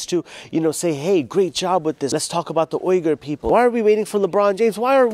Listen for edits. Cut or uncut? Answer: cut